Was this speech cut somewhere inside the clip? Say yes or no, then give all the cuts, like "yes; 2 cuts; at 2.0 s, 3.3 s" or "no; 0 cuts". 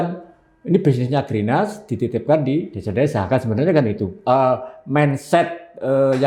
no; 0 cuts